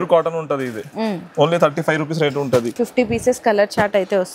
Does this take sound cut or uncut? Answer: cut